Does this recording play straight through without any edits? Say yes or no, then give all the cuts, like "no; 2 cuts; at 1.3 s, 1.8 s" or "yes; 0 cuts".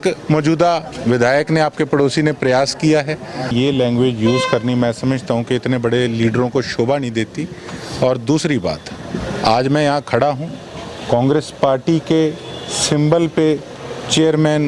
no; 1 cut; at 3.5 s